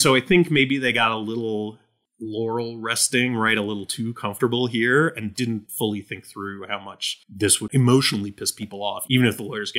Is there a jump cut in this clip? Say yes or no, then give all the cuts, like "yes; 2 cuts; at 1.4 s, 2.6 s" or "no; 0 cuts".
yes; 3 cuts; at 5.5 s, 7.7 s, 9.0 s